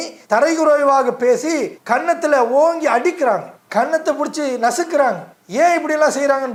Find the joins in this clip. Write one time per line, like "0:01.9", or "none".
none